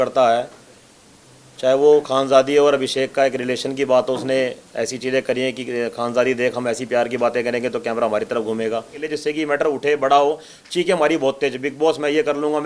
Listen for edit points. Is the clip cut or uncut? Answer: cut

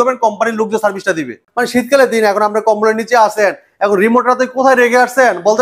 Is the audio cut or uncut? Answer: cut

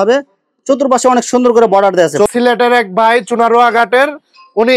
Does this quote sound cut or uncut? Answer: cut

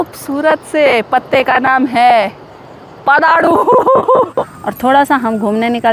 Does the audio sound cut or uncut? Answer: cut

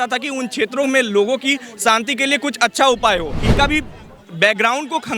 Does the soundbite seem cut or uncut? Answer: cut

